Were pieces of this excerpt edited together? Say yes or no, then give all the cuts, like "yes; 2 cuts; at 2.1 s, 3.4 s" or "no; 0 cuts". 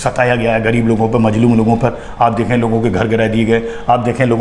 no; 0 cuts